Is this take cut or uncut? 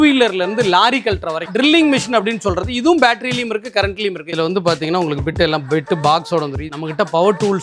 cut